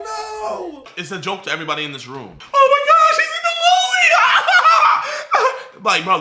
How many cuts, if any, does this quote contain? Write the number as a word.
two